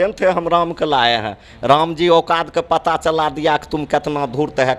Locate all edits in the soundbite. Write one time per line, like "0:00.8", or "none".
none